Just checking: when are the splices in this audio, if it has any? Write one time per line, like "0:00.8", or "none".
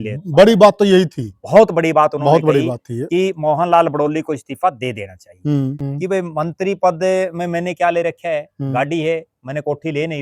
0:05.8